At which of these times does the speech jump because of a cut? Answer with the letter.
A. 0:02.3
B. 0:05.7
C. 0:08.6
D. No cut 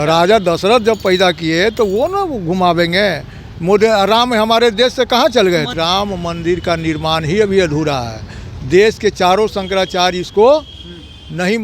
B